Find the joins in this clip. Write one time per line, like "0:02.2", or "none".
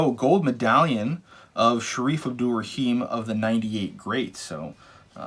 none